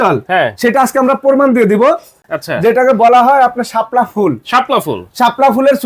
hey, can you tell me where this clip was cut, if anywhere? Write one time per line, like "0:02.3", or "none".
0:02.3